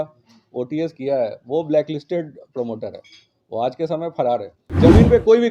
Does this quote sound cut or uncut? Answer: cut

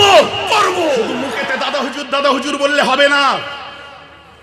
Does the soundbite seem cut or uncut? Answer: cut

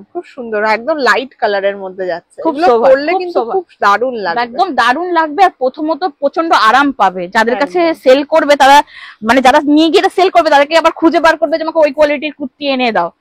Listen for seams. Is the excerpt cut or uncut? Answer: uncut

